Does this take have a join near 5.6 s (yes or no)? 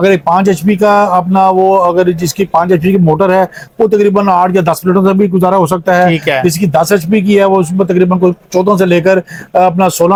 no